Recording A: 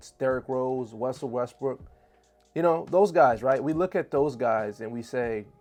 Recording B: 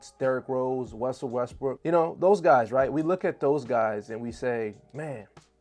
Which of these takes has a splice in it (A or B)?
B